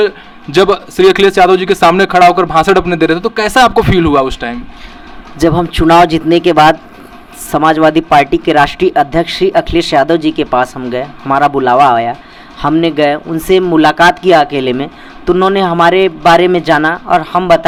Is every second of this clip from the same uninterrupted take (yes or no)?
yes